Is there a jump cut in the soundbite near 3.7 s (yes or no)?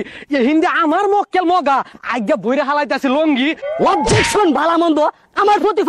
yes